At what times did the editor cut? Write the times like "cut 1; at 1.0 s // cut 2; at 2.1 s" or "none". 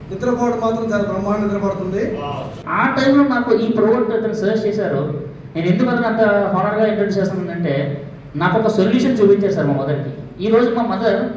cut 1; at 2.6 s